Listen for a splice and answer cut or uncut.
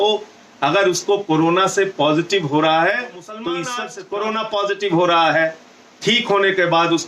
cut